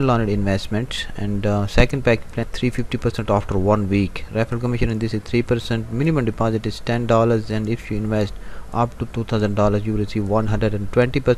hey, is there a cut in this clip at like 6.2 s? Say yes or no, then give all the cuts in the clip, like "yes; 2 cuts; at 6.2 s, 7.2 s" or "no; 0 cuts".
no; 1 cut; at 2.5 s